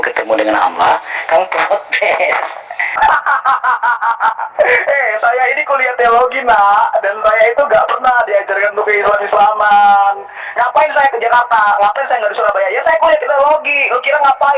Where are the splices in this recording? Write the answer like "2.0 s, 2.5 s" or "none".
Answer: 3.0 s